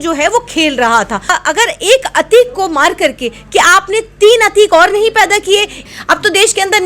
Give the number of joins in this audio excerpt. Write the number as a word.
two